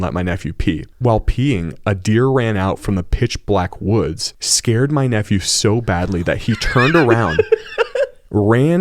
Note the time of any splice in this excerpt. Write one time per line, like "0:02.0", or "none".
none